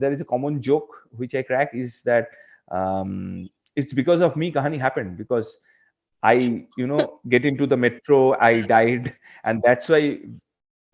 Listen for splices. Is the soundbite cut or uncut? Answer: uncut